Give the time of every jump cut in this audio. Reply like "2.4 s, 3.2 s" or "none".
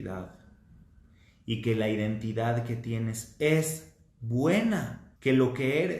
5.0 s